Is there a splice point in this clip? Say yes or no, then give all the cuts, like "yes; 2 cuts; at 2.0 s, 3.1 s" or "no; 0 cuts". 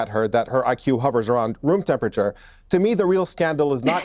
no; 0 cuts